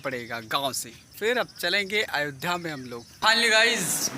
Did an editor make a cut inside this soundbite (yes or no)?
yes